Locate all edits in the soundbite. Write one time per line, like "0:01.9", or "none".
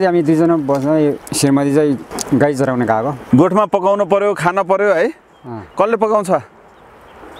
0:01.2
0:02.1
0:03.2